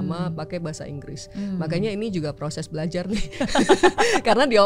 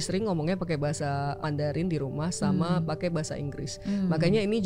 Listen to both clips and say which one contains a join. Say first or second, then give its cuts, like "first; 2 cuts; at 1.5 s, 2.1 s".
second; 1 cut; at 1.4 s